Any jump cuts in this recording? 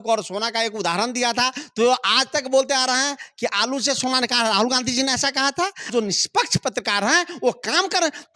yes; 1 cut; at 5.9 s

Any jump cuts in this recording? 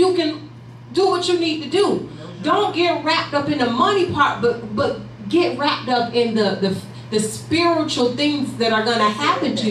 no; 0 cuts

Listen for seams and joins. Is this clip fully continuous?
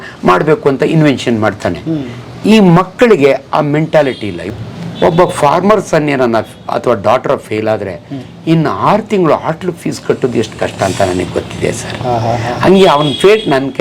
no; 1 cut; at 4.5 s

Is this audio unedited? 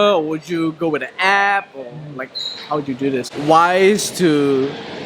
no; 1 cut; at 3.2 s

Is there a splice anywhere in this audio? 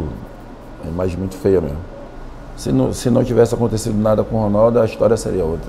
yes; 1 cut; at 1.9 s

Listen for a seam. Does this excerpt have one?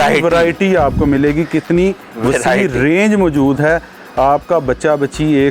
no; 0 cuts

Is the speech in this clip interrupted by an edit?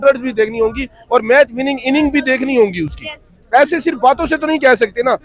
no; 0 cuts

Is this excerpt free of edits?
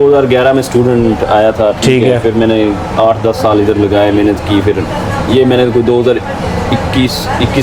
yes; 0 cuts

